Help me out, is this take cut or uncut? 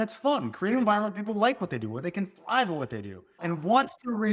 cut